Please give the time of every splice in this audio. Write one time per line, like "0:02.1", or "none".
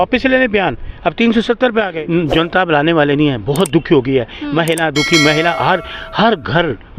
0:02.0

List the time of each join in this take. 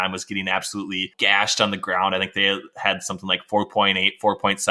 0:01.1

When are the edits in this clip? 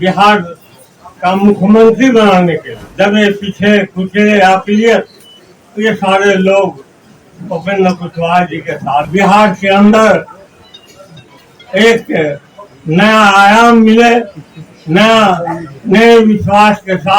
0:02.8
0:09.1

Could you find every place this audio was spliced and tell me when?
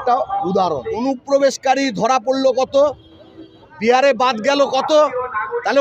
0:01.0

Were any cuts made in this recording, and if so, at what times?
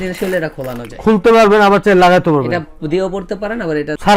none

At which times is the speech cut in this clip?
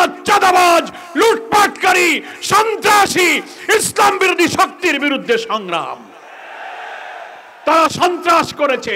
0:07.5

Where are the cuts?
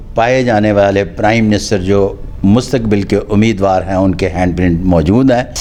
none

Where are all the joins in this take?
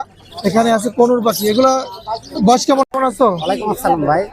0:02.8

